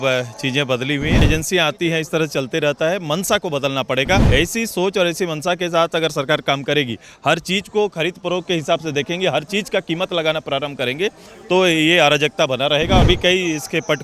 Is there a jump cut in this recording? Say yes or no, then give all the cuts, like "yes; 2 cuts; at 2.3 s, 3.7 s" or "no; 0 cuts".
yes; 3 cuts; at 1.2 s, 4.2 s, 13.0 s